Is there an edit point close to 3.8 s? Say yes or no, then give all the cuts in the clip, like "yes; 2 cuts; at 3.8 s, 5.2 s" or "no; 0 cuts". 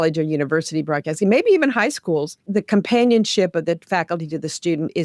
no; 1 cut; at 2.4 s